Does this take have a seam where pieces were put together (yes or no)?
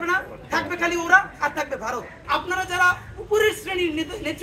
yes